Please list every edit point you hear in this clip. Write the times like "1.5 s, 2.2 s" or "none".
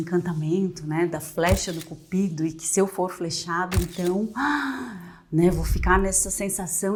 none